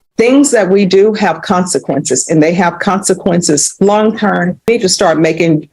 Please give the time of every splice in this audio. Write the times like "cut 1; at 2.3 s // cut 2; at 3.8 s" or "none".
cut 1; at 4.7 s